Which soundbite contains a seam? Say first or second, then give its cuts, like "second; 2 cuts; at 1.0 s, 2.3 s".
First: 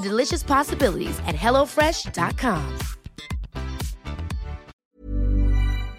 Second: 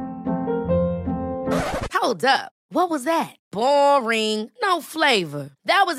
first; 1 cut; at 4.7 s